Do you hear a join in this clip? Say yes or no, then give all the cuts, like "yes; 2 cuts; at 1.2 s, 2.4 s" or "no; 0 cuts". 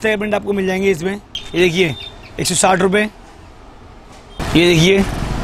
no; 0 cuts